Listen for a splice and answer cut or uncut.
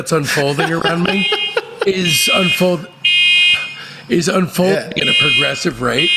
uncut